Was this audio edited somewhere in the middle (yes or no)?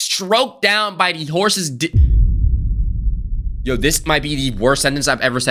no